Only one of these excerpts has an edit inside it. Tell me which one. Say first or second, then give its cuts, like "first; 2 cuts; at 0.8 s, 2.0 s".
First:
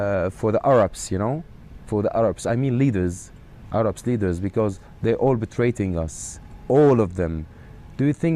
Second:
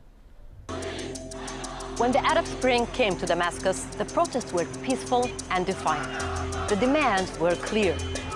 first; 1 cut; at 1.8 s